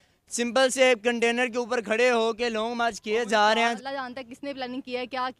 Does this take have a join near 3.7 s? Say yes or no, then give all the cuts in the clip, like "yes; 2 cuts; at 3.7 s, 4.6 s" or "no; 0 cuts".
yes; 1 cut; at 3.7 s